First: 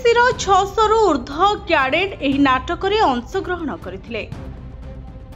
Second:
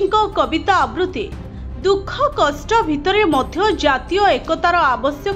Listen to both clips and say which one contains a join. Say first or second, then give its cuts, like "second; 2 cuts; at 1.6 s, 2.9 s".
first; 1 cut; at 4.3 s